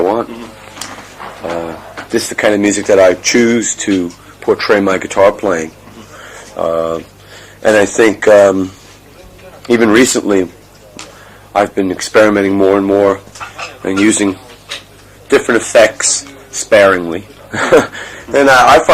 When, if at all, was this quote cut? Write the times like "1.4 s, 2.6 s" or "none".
17.7 s